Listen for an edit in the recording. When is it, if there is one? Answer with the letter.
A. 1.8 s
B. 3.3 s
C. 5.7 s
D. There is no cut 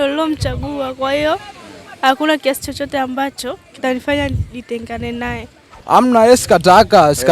C